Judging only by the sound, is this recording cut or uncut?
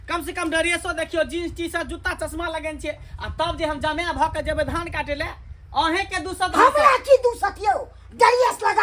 uncut